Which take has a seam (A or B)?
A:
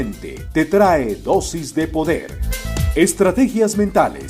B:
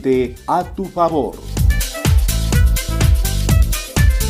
B